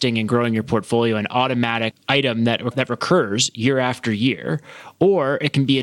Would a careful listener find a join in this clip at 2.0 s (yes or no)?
yes